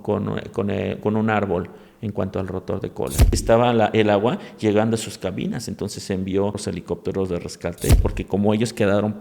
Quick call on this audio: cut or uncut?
cut